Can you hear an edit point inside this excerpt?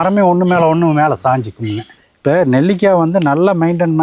yes; 1 cut; at 2.1 s

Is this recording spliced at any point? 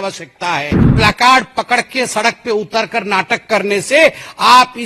yes; 1 cut; at 0.9 s

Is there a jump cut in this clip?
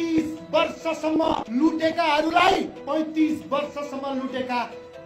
yes; 2 cuts; at 1.5 s, 2.8 s

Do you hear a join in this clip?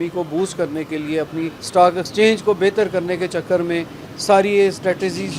yes; 1 cut; at 1.6 s

